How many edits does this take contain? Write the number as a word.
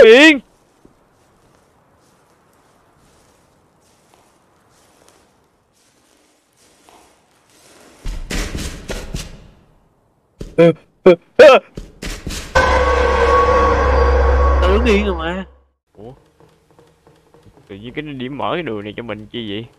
one